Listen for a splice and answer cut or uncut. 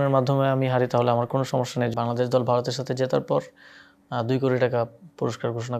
cut